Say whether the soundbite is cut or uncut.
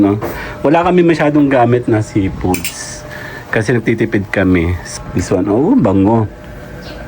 cut